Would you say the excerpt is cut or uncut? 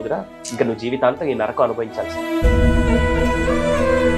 uncut